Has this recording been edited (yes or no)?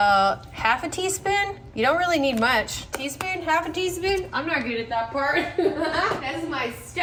no